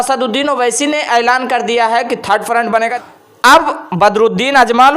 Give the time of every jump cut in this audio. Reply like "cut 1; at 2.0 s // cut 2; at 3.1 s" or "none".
cut 1; at 3.0 s